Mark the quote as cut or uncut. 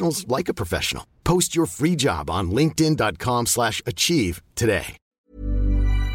cut